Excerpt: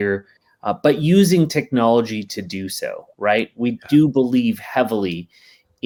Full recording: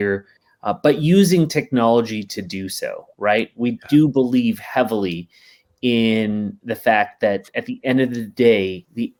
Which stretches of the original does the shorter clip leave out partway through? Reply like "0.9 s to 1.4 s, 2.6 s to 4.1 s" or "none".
none